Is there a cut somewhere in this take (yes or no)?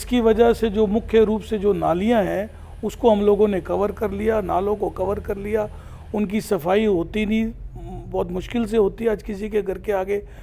no